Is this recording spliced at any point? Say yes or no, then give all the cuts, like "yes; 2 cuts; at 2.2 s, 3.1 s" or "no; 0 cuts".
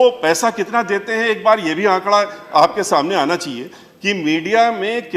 no; 0 cuts